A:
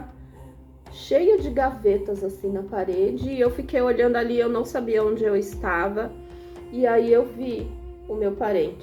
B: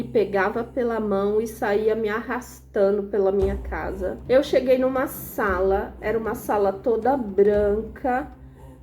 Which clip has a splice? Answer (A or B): B